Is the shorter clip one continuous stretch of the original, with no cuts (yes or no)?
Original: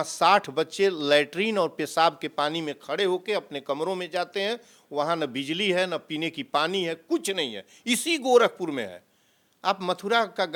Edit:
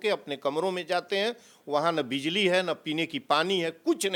yes